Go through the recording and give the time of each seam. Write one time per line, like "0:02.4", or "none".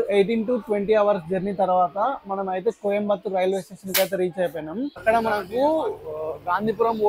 0:04.9